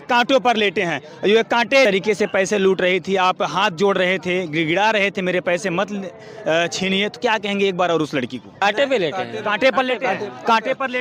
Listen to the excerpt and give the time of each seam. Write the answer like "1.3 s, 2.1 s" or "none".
1.9 s, 8.6 s